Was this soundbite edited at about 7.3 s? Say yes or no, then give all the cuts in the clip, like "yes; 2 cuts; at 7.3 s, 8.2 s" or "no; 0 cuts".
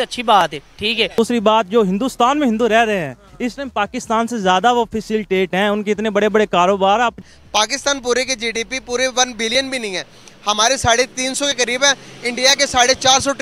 yes; 2 cuts; at 1.2 s, 7.3 s